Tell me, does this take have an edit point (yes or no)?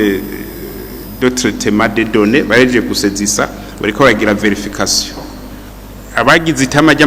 yes